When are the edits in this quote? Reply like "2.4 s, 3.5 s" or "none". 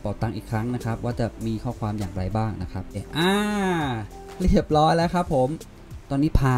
3.0 s, 5.6 s